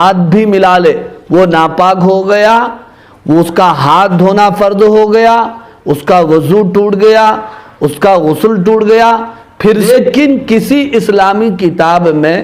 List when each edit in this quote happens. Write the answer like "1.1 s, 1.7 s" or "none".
9.9 s